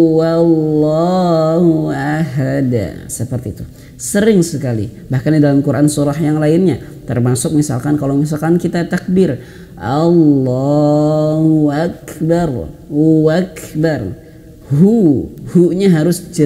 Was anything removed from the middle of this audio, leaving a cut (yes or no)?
no